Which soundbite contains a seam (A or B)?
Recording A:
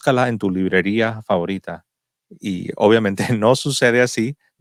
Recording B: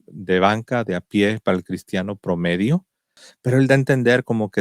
B